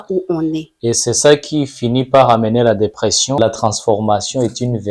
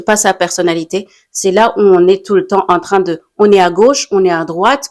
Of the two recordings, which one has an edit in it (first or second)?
first